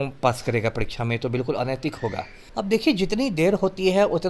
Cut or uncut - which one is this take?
cut